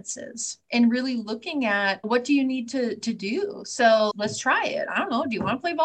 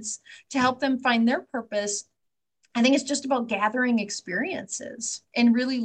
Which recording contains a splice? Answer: first; 1 cut; at 4.1 s

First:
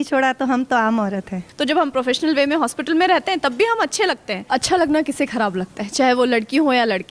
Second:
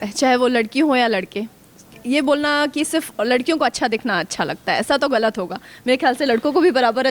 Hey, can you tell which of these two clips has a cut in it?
first; 2 cuts; at 1.4 s, 4.4 s

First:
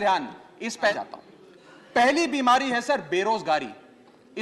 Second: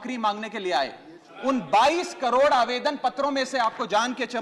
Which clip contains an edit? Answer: first; 1 cut; at 0.9 s

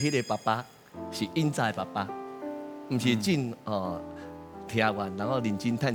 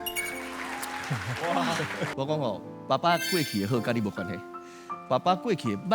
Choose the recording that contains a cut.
second; 1 cut; at 2.1 s

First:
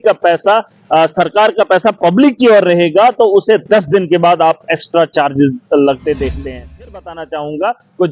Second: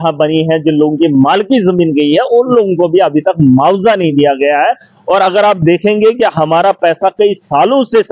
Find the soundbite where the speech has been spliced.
first; 1 cut; at 6.9 s

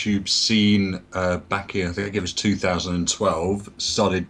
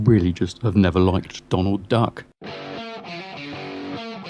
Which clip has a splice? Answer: second; 1 cut; at 2.2 s

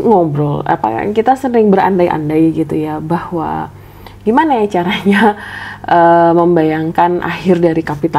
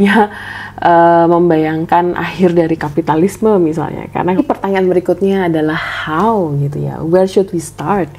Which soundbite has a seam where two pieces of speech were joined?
second; 1 cut; at 4.4 s

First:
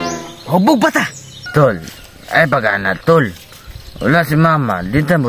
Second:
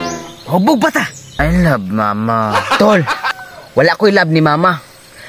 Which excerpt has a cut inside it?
second; 1 cut; at 1.3 s

